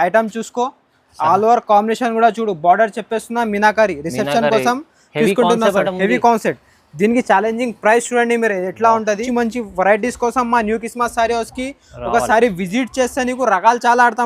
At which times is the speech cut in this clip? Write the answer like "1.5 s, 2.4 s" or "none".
9.2 s